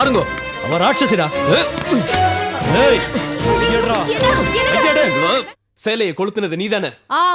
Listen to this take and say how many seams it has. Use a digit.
1